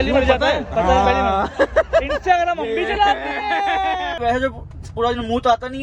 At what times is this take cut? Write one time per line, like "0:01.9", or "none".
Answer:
0:04.2